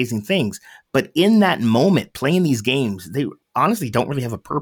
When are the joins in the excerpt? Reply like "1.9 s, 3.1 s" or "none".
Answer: 3.4 s